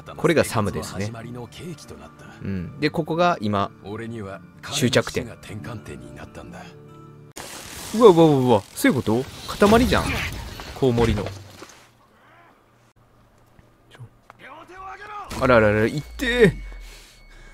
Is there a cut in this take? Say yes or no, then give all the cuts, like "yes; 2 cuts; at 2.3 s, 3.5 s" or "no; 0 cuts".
yes; 2 cuts; at 7.4 s, 12.9 s